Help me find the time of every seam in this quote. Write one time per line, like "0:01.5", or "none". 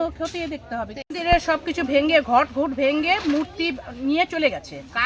0:01.0